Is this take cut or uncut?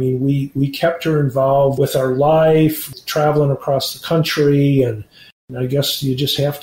cut